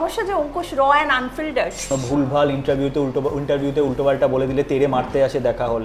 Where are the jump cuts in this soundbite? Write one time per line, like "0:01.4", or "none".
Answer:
0:01.9